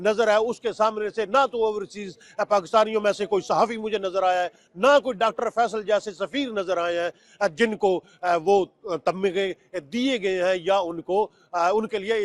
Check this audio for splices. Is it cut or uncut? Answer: uncut